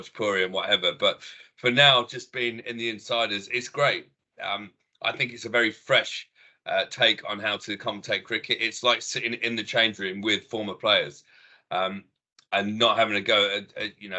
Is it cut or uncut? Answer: uncut